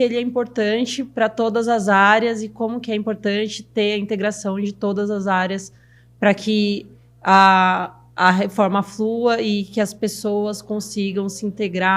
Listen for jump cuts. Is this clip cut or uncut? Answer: uncut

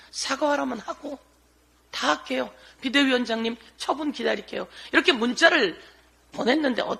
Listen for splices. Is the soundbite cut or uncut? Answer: uncut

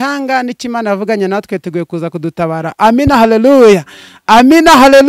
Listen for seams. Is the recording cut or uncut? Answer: uncut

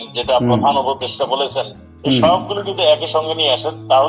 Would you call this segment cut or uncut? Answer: uncut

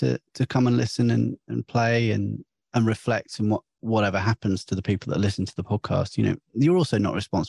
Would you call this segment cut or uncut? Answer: uncut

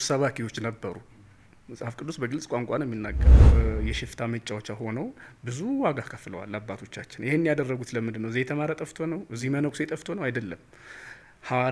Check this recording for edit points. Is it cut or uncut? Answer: cut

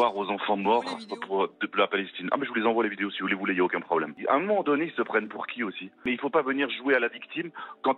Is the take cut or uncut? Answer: cut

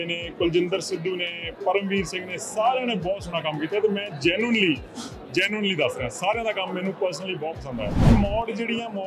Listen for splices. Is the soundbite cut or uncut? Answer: cut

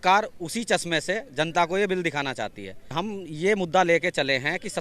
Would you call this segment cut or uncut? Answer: cut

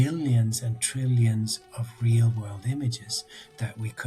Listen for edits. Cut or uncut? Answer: uncut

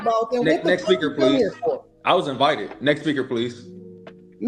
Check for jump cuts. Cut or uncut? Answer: cut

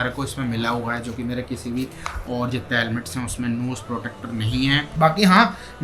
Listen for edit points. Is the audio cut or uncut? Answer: cut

